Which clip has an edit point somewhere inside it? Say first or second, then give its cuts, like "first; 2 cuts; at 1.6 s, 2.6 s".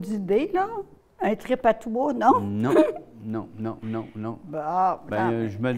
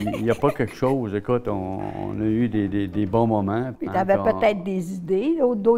second; 1 cut; at 3.8 s